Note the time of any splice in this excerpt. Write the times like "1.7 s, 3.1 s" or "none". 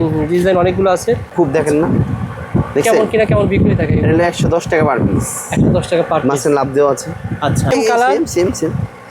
1.3 s, 7.7 s